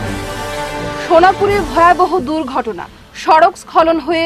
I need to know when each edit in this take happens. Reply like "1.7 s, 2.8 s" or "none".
1.0 s